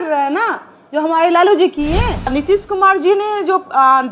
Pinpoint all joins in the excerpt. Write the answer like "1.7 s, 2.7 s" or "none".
2.3 s